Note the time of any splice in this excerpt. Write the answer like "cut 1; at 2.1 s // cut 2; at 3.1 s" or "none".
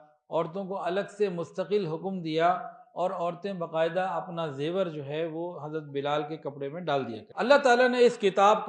cut 1; at 7.2 s